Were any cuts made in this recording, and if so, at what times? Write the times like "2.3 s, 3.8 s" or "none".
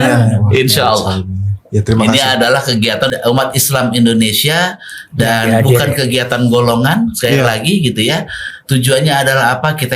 3.1 s